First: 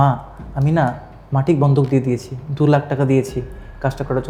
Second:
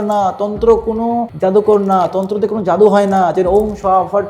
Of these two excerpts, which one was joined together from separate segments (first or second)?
second